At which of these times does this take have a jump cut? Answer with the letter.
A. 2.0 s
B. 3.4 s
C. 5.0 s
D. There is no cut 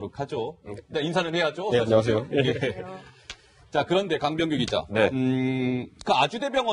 B